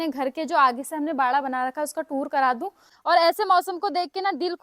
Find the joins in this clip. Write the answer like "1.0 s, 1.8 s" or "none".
2.9 s